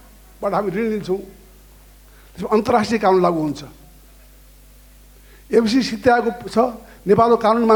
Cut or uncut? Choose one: uncut